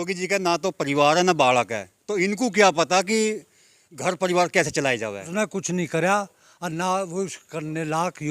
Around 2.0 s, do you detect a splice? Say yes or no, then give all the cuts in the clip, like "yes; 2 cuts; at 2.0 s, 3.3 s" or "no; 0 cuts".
no; 1 cut; at 5.3 s